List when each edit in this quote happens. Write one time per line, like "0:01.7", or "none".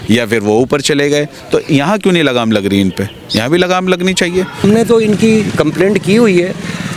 0:04.6

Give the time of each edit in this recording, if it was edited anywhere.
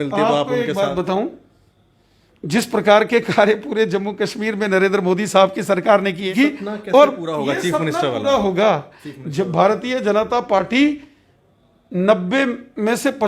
0:06.3

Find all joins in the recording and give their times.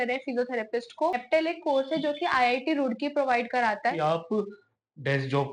0:01.2
0:04.0

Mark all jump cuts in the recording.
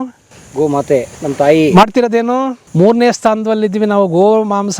0:01.1
0:02.6

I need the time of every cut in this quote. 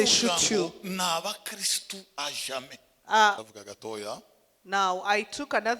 0:03.4

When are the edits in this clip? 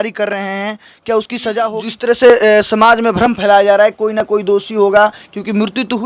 0:01.9

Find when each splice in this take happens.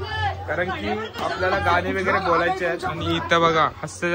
none

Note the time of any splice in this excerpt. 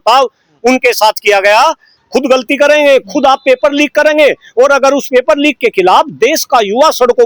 0:01.9

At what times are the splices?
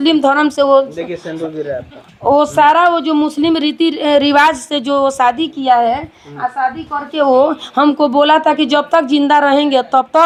none

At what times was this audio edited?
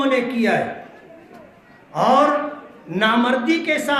none

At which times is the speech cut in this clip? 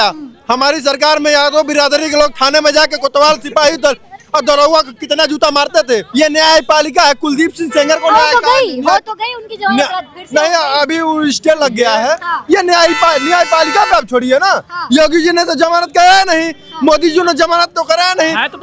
0:06.1

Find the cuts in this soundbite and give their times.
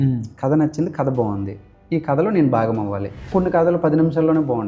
0:03.3

